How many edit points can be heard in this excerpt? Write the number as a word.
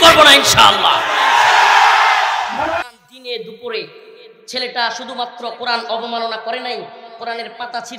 one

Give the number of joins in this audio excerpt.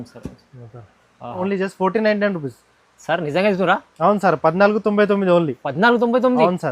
one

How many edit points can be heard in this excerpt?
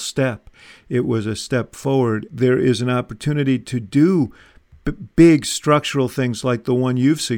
one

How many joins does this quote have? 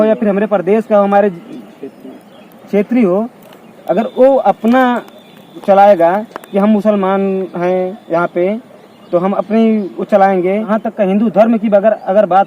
one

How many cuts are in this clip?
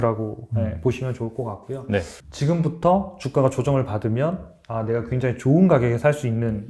one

